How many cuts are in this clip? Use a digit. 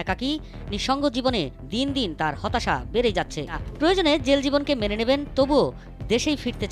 1